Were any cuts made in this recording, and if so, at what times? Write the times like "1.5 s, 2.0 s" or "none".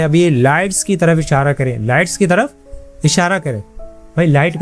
none